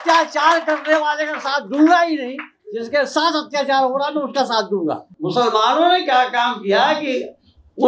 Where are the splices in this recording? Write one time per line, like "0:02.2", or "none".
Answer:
0:05.2